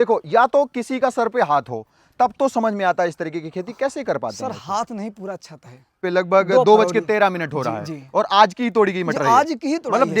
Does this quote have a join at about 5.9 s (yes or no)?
yes